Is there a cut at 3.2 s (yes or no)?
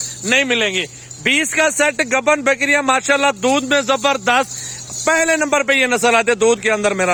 no